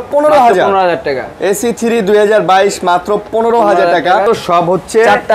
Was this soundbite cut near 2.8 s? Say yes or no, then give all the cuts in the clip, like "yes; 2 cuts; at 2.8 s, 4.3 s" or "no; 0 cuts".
no; 1 cut; at 4.2 s